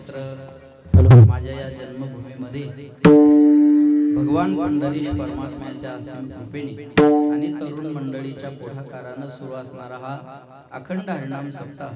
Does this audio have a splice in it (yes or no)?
yes